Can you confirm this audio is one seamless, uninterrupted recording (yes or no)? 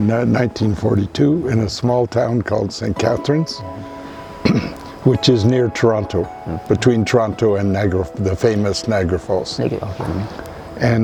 yes